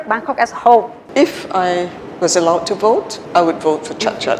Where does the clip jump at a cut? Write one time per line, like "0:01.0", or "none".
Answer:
0:01.0
0:03.2